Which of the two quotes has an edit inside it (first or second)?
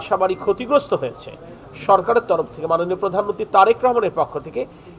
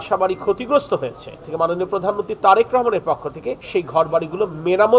second